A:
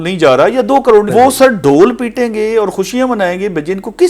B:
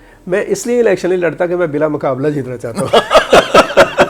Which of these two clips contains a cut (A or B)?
A